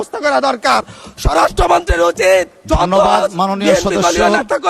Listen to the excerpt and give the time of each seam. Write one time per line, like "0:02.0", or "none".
none